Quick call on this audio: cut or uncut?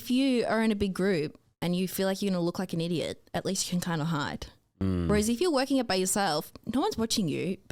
uncut